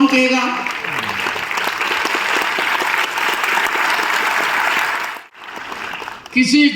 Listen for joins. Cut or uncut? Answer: cut